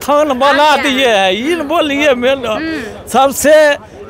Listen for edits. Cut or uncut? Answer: uncut